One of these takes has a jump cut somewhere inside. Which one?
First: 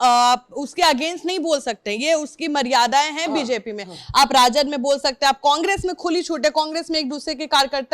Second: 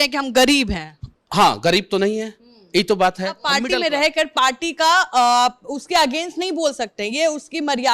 second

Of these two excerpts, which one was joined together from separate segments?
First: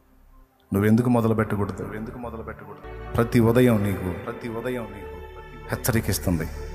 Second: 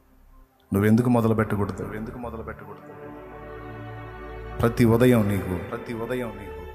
first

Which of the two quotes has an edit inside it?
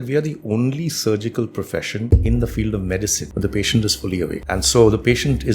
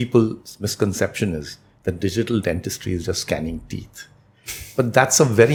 first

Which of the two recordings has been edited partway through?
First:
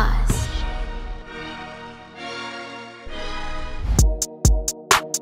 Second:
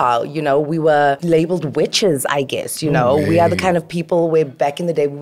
second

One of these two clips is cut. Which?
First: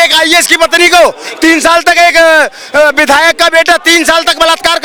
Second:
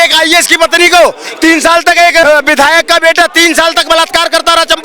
second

